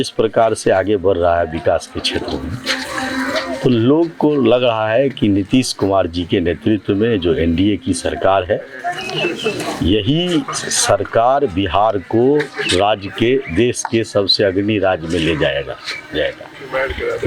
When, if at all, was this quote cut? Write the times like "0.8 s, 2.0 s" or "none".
none